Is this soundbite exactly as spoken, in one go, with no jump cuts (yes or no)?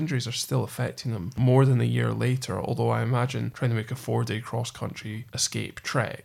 no